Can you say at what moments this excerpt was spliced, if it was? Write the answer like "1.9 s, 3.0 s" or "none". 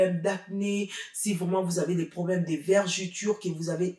none